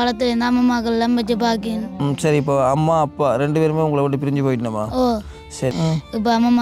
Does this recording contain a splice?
yes; 1 cut; at 5.7 s

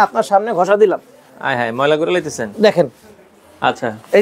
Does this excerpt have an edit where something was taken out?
no; 0 cuts

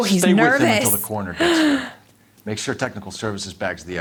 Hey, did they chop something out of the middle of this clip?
no; 0 cuts

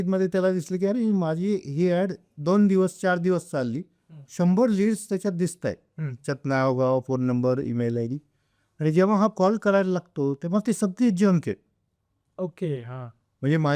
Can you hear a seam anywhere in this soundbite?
no; 0 cuts

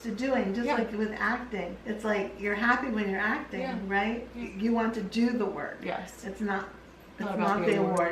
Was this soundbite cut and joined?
yes; 2 cuts; at 1.2 s, 4.4 s

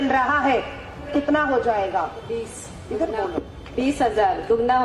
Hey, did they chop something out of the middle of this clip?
yes; 1 cut; at 1.1 s

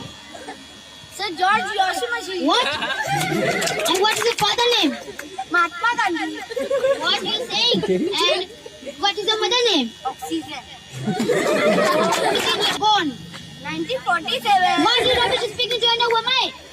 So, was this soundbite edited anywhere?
yes; 1 cut; at 12.6 s

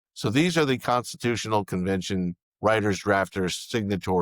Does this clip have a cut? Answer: yes; 1 cut; at 2.4 s

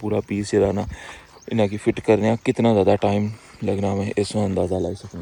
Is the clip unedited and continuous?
yes; 0 cuts

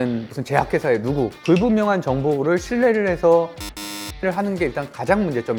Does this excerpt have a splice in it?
no; 0 cuts

